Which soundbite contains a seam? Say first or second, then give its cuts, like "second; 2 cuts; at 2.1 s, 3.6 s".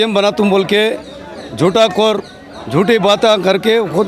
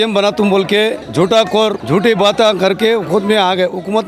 second; 2 cuts; at 1.0 s, 1.8 s